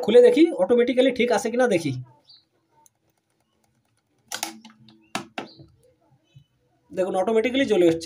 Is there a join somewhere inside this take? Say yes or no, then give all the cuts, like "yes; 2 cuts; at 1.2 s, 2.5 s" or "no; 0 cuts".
no; 0 cuts